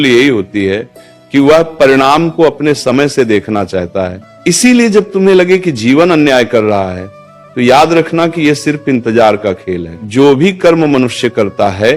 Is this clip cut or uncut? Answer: cut